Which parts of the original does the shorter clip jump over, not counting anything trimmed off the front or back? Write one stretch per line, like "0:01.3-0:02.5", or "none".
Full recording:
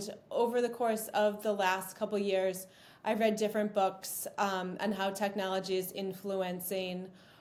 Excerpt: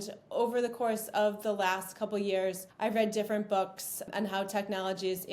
0:02.7-0:02.9
0:04.3-0:04.7